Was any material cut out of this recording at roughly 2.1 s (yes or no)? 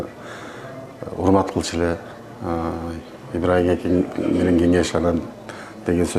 no